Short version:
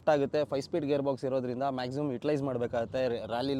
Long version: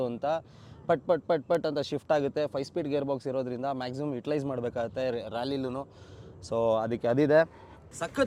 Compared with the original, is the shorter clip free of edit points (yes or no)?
yes